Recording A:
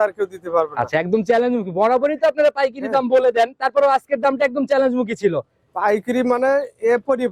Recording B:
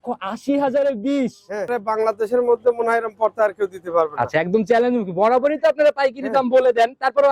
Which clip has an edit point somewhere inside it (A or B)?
B